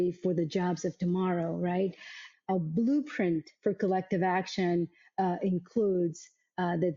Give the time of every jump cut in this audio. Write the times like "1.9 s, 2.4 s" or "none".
2.2 s